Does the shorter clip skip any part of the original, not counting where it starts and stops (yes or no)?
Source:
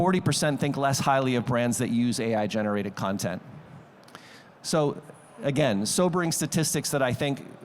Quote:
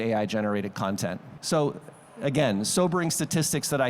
yes